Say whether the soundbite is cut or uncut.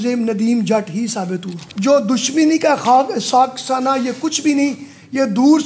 cut